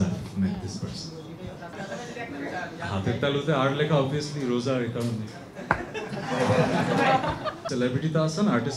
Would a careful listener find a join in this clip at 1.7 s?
no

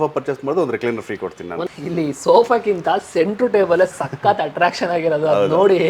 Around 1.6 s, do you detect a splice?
yes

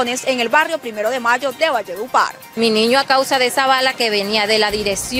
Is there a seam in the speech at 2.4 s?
yes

